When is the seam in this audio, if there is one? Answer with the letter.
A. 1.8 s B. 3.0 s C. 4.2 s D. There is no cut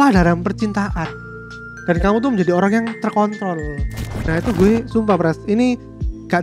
C